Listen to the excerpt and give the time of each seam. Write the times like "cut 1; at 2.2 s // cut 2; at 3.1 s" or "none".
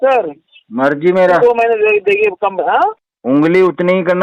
cut 1; at 3.1 s